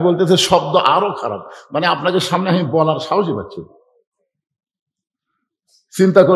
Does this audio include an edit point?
no; 0 cuts

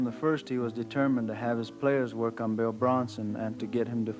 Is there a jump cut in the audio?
no; 0 cuts

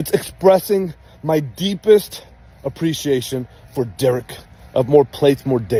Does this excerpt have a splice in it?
no; 0 cuts

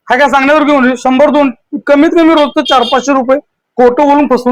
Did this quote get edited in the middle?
no; 0 cuts

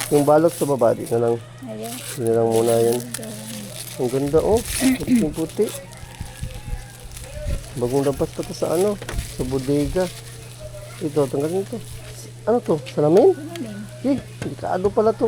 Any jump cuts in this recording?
no; 0 cuts

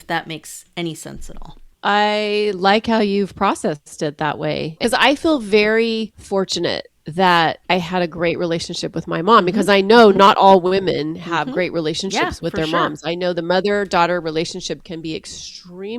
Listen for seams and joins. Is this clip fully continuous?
no; 4 cuts; at 1.7 s, 4.8 s, 6.2 s, 7.6 s

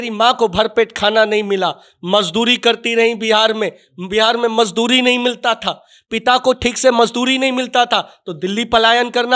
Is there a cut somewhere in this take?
no; 0 cuts

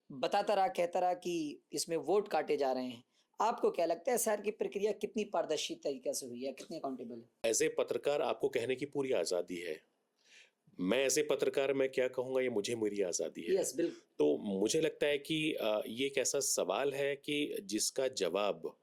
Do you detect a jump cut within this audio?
yes; 1 cut; at 7.3 s

